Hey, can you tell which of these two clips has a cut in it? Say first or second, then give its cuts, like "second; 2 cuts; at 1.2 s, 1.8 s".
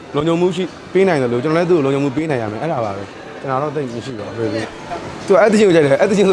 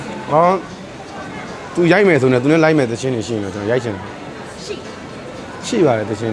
first; 1 cut; at 4.9 s